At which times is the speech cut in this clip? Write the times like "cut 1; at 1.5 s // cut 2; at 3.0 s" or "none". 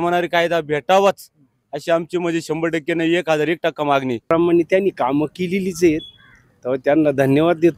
cut 1; at 4.2 s